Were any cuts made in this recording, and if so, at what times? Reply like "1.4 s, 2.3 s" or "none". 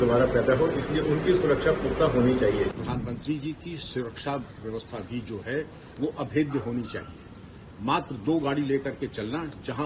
2.8 s